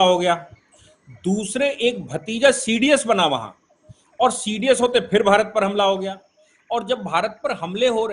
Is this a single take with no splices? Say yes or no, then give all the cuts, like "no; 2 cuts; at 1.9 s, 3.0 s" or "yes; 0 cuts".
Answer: yes; 0 cuts